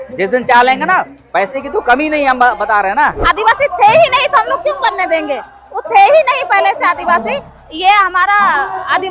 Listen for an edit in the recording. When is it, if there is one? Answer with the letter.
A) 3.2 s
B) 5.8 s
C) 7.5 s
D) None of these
A